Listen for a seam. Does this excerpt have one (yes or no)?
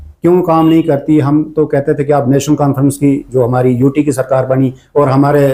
no